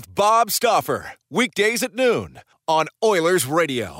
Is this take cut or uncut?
uncut